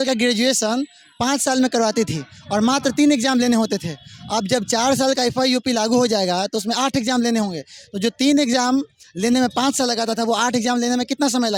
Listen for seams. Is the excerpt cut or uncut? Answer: uncut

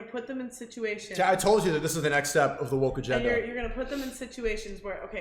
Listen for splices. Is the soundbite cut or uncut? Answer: uncut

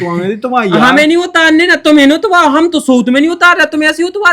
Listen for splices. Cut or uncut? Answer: uncut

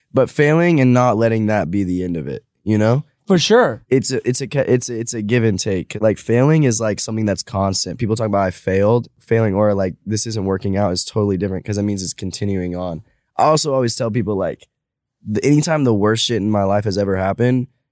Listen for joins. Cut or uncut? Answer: cut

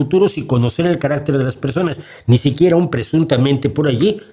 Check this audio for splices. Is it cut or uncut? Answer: uncut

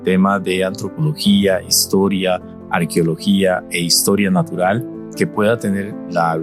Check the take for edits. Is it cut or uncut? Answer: cut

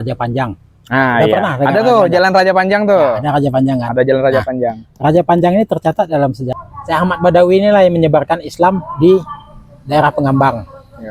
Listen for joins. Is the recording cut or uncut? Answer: cut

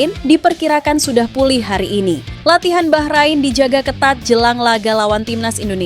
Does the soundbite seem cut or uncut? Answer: cut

